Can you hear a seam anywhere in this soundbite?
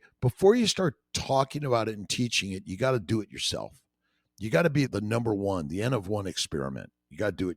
yes; 1 cut; at 4.9 s

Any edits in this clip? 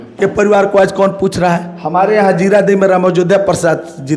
no; 0 cuts

